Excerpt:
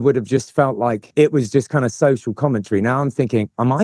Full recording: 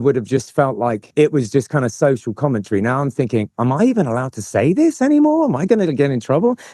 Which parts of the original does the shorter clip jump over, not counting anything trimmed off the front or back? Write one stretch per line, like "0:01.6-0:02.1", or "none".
none

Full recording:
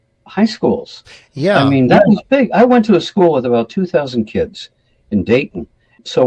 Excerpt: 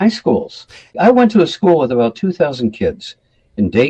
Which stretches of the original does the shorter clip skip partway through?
0:01.3-0:02.5

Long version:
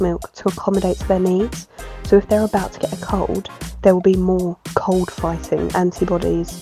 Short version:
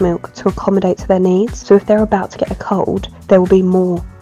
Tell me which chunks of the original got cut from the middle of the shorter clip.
0:01.6-0:02.0
0:03.5-0:03.6

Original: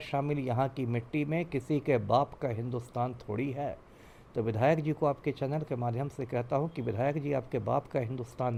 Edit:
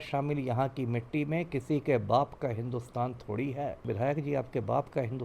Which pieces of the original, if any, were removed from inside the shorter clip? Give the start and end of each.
0:03.8-0:06.8

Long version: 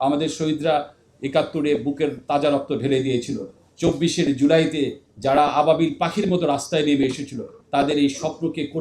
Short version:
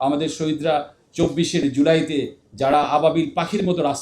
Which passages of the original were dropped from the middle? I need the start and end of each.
0:01.0-0:03.6

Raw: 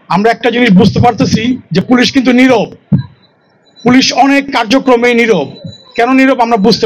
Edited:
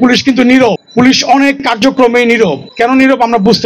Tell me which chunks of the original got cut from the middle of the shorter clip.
0:02.7-0:03.7
0:05.5-0:05.8

